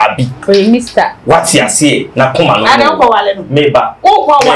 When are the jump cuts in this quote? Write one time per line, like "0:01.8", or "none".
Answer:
none